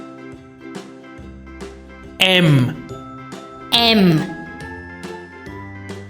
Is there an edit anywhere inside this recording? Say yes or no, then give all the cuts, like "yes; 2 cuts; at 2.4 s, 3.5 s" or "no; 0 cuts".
yes; 2 cuts; at 1.9 s, 4.3 s